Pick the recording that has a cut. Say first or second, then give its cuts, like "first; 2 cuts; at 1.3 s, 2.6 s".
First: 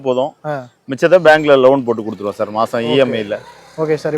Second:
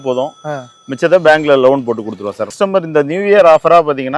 second; 1 cut; at 2.6 s